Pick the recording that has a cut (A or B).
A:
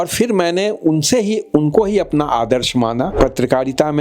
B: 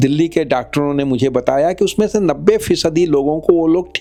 A